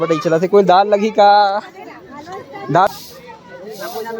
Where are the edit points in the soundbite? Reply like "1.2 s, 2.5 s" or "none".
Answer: 2.9 s